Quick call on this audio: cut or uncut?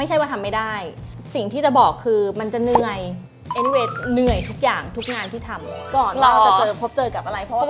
cut